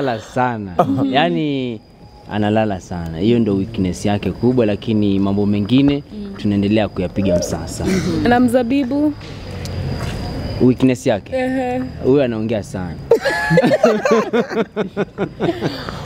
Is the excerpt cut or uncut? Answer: uncut